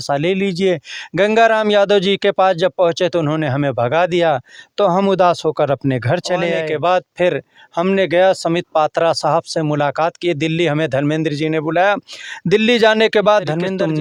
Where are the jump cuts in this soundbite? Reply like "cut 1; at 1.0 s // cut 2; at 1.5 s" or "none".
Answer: none